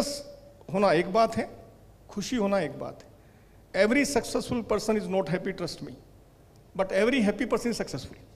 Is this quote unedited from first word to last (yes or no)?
yes